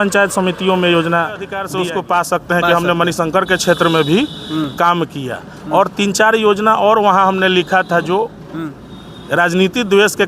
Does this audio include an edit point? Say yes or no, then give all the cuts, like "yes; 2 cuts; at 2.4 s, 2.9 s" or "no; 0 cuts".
yes; 1 cut; at 1.6 s